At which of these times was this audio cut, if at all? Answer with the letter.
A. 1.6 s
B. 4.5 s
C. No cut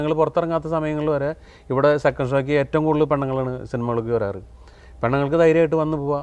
C